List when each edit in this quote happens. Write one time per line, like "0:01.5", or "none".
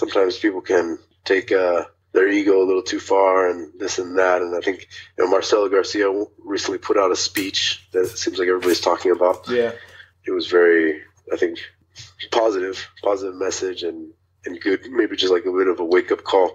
0:01.1
0:02.0